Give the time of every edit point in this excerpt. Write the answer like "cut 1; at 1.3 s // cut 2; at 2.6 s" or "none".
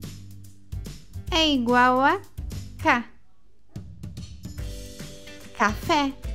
cut 1; at 1.3 s